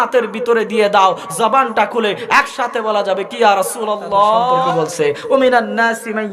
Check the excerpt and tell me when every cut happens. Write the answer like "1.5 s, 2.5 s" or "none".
4.6 s